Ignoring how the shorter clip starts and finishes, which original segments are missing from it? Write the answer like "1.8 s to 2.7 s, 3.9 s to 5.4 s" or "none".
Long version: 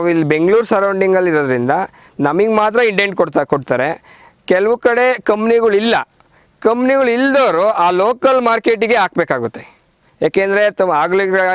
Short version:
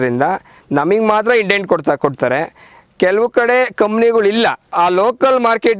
6.2 s to 7.8 s